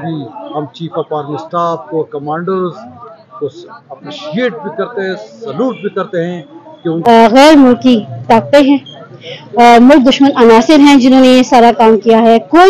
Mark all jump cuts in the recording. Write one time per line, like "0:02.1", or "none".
0:06.9

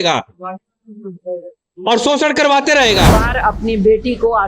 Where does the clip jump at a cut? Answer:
0:03.1

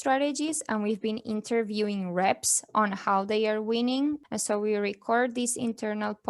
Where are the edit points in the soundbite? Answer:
0:04.2

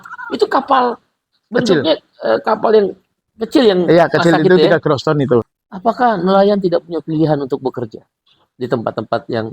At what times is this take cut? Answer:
0:05.5

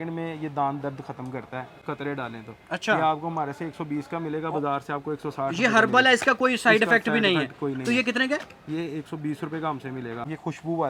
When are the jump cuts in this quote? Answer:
none

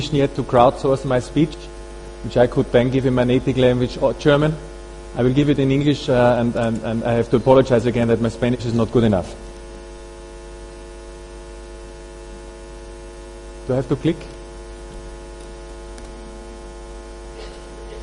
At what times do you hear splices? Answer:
none

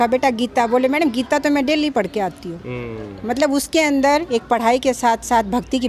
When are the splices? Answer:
none

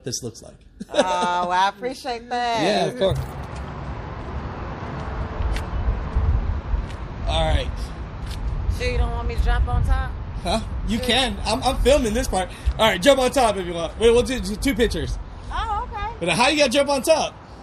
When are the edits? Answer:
0:03.2

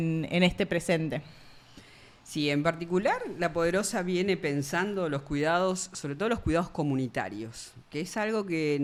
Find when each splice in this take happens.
none

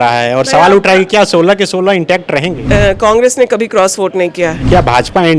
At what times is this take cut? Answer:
0:02.6
0:04.6

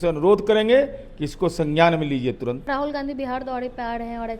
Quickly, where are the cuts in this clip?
0:02.7

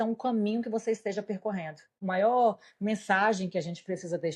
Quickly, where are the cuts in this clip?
0:02.0

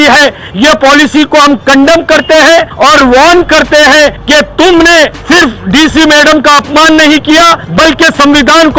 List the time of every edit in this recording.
0:02.7
0:04.2
0:05.2
0:07.6

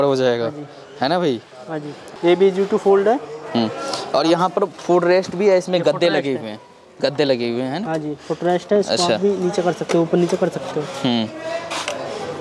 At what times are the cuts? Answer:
none

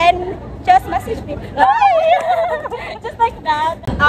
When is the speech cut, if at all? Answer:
none

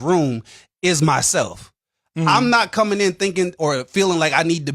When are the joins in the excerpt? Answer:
0:02.0

